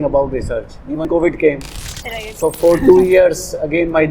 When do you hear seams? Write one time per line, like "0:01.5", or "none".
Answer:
0:01.0